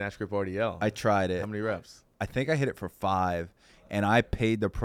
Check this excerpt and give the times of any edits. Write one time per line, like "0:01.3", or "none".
0:01.6